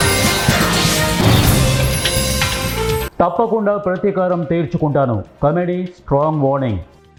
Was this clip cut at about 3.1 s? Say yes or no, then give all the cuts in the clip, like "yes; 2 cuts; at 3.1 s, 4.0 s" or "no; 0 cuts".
no; 0 cuts